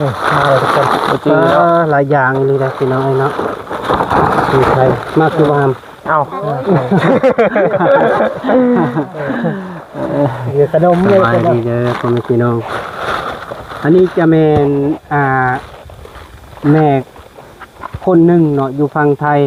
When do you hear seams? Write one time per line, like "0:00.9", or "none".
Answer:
none

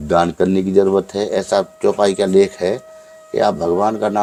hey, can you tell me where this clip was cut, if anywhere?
none

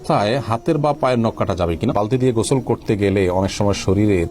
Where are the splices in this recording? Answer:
0:01.9

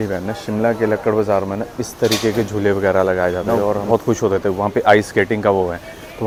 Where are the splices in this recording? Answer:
none

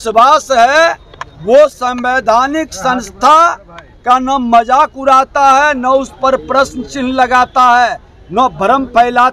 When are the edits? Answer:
none

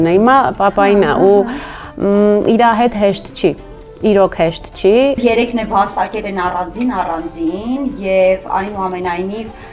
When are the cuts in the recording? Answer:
0:05.2

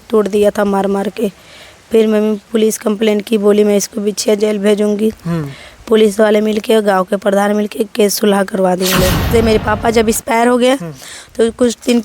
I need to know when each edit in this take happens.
0:09.2

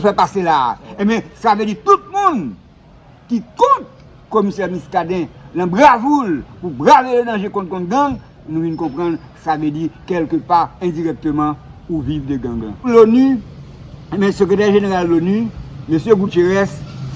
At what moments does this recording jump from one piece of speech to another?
0:12.9

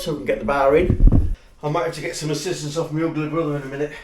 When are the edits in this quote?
0:01.3

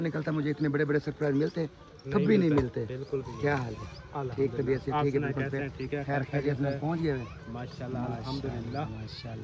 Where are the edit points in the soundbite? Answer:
none

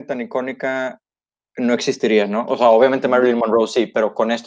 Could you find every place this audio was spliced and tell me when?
none

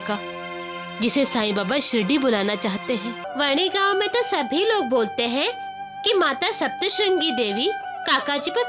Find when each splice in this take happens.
0:03.2

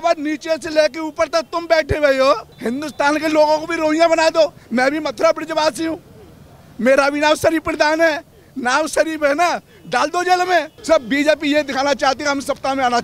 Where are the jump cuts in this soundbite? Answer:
0:02.5
0:10.7

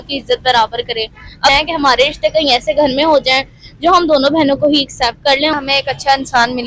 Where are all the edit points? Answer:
0:01.5
0:05.5

